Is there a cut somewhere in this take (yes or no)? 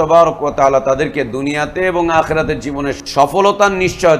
yes